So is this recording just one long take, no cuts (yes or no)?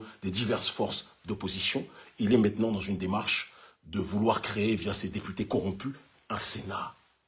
yes